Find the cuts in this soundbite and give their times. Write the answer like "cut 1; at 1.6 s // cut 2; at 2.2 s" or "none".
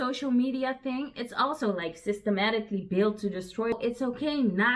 cut 1; at 3.7 s

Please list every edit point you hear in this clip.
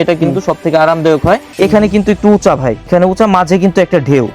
cut 1; at 1.5 s // cut 2; at 2.9 s

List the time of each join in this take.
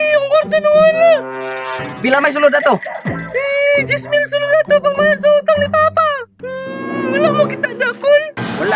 cut 1; at 6.3 s

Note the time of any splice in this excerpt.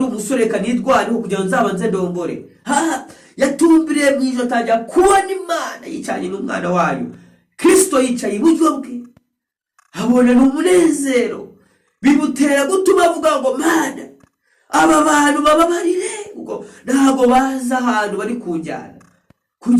none

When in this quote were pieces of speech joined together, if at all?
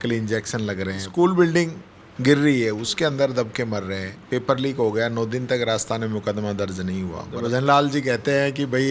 cut 1; at 1.1 s // cut 2; at 4.1 s // cut 3; at 7.3 s

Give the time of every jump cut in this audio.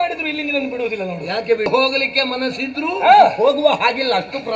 cut 1; at 1.7 s

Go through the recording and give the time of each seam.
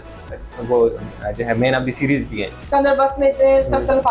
cut 1; at 2.5 s

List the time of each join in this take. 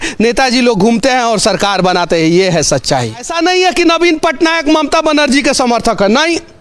cut 1; at 3.3 s

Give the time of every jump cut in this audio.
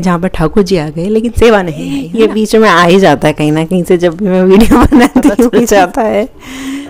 cut 1; at 2.1 s // cut 2; at 5.8 s

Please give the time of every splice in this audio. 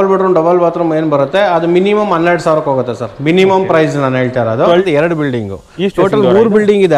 cut 1; at 4.8 s

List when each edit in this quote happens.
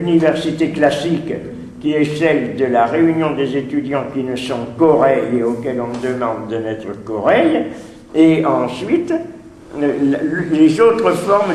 cut 1; at 6.3 s

